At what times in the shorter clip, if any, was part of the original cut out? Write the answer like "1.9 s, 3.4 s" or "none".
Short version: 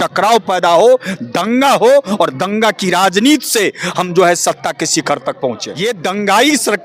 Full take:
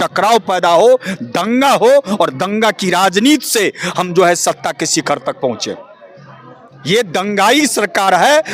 5.7 s